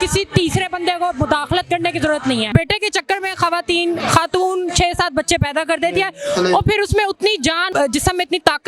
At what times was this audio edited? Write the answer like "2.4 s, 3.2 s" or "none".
2.5 s, 7.6 s